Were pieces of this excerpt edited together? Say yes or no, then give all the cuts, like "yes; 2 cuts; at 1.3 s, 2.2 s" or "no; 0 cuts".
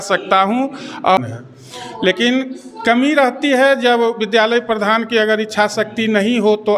yes; 2 cuts; at 1.2 s, 3.1 s